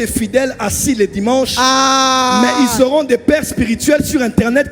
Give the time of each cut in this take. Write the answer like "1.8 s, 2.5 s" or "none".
none